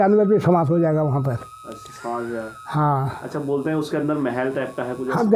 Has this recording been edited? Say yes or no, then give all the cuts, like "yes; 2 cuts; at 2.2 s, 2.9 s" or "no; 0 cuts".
no; 0 cuts